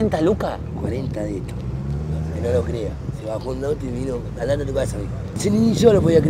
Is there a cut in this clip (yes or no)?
yes